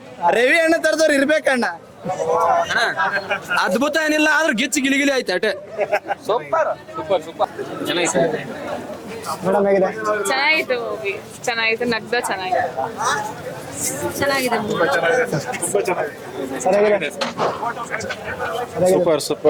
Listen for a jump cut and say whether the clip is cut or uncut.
uncut